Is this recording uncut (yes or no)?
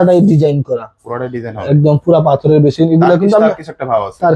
yes